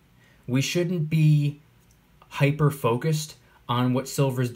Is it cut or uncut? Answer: uncut